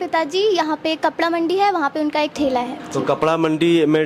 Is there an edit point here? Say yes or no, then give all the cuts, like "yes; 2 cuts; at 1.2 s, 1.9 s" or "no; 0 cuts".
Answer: yes; 1 cut; at 2.8 s